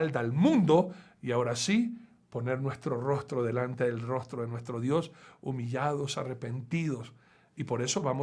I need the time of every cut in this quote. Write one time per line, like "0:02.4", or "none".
0:05.3